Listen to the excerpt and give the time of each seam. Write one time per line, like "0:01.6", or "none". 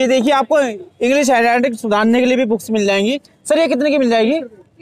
none